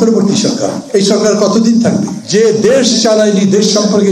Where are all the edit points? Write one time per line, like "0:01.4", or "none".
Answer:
0:02.2

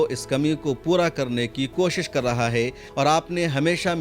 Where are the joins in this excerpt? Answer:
0:02.8

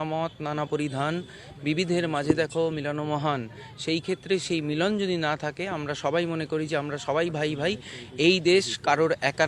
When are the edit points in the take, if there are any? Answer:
none

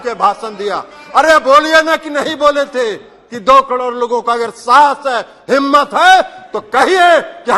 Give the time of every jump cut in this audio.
none

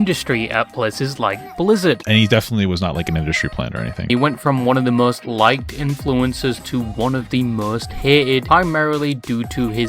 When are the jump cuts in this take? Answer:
0:02.0
0:04.1
0:08.4

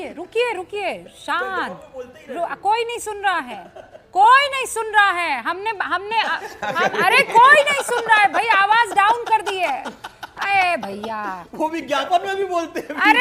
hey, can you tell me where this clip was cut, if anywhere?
none

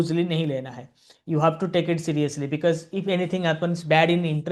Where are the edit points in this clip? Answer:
none

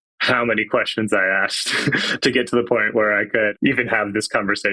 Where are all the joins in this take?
0:03.5

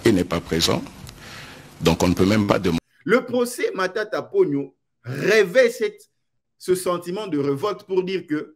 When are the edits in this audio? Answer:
0:02.8

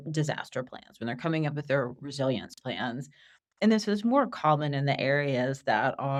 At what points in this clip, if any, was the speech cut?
none

